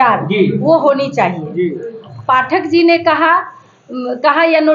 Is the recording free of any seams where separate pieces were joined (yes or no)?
no